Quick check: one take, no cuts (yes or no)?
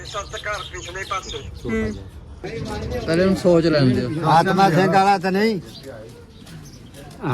no